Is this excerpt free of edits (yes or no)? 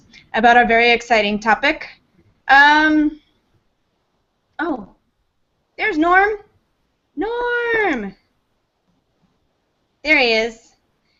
yes